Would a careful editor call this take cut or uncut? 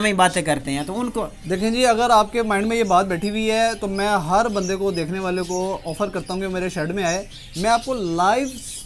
uncut